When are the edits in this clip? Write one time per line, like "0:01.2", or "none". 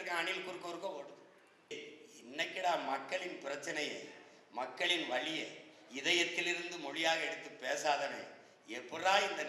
0:01.7

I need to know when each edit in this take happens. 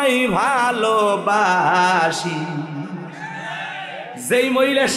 none

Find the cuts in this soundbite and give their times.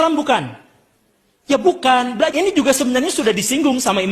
0:02.3

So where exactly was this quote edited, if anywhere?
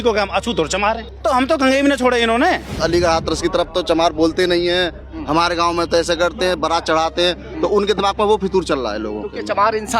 0:01.1
0:02.7

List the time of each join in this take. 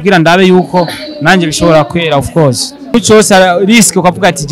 0:02.9

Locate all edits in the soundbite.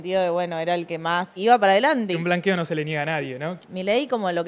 0:01.3
0:02.2
0:03.6

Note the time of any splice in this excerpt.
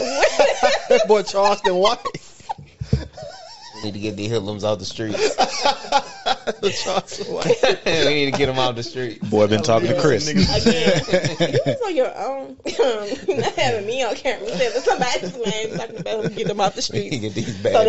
none

